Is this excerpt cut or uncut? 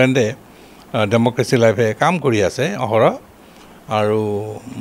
uncut